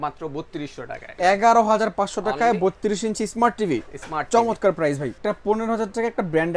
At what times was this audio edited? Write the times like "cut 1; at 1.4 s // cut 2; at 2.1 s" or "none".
cut 1; at 1.1 s // cut 2; at 5.1 s